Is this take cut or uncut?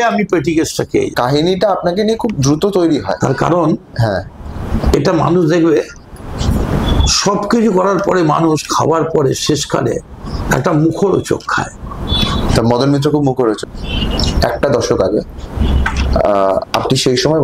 cut